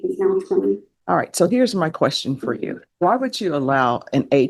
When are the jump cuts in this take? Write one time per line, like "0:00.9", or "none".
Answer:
0:00.9